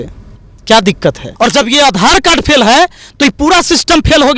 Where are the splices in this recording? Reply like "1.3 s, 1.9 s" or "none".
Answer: 1.2 s